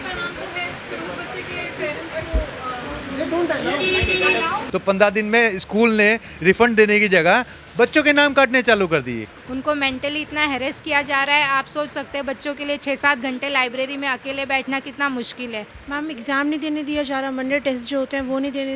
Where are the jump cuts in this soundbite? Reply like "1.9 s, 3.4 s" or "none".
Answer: 4.6 s, 9.4 s, 15.7 s